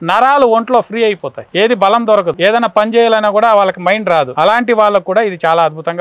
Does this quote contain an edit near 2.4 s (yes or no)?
yes